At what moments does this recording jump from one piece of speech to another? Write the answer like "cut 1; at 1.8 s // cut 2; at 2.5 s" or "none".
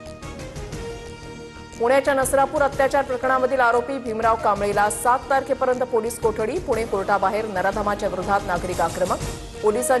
cut 1; at 1.6 s